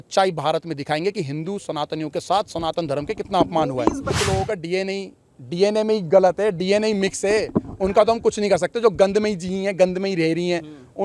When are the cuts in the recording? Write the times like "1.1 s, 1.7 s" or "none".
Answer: 4.1 s